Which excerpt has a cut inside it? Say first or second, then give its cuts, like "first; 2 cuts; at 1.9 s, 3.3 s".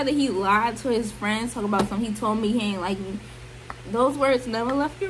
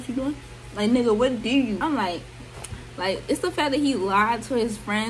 second; 1 cut; at 1.8 s